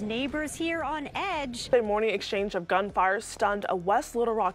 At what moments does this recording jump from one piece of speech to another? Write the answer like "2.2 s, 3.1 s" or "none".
1.7 s